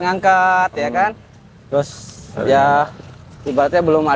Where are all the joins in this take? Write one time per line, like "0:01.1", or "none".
none